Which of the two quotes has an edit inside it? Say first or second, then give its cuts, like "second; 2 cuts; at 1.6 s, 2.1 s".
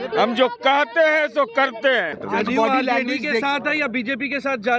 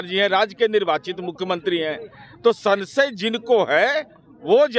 first; 1 cut; at 2.2 s